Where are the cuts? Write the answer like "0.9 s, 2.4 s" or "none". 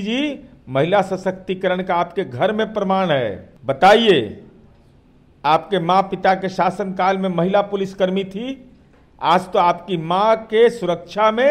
3.5 s